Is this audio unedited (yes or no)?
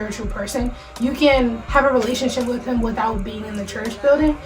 yes